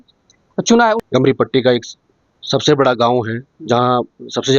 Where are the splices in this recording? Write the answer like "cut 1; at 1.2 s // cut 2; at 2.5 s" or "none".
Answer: cut 1; at 1.0 s